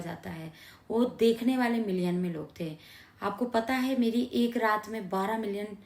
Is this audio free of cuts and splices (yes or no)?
yes